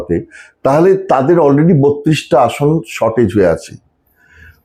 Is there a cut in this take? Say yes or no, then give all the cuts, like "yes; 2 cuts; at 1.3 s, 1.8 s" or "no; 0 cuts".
no; 0 cuts